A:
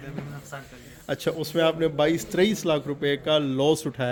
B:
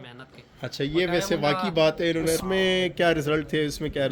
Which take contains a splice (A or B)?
B